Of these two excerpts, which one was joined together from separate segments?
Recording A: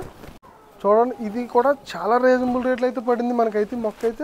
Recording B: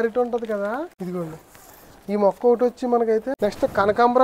B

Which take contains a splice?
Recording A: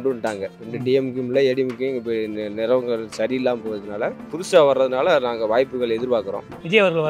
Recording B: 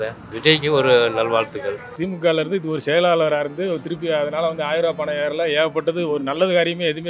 B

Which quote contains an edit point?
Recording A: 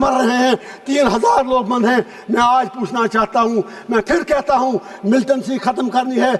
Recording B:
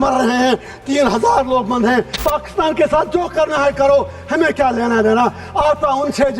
B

